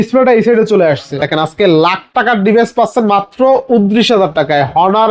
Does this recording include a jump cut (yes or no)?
yes